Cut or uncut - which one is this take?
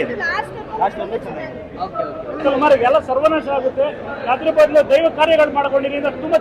cut